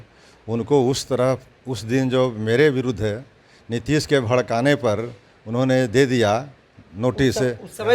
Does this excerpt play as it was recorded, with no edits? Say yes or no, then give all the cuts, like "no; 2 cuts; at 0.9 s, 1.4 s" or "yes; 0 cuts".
yes; 0 cuts